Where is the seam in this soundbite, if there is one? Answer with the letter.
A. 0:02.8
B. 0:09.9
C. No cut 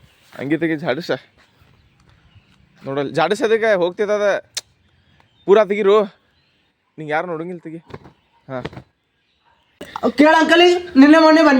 B